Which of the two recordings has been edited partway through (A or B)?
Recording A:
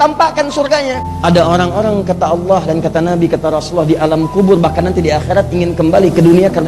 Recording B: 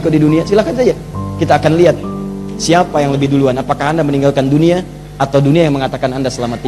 A